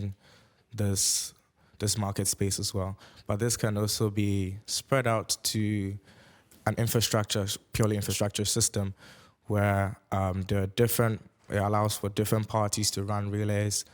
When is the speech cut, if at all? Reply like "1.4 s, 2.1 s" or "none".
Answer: none